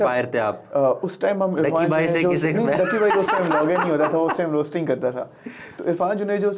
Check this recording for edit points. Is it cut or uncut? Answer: uncut